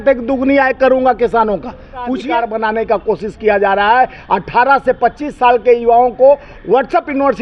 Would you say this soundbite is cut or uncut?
cut